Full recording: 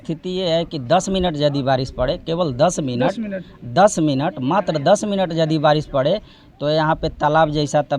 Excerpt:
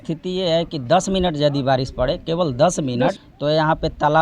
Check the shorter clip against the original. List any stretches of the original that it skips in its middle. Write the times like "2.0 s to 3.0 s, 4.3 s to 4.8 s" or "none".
3.3 s to 6.5 s